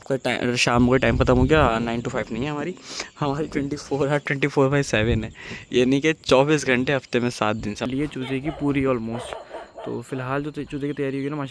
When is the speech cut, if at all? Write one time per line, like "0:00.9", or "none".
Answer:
0:07.9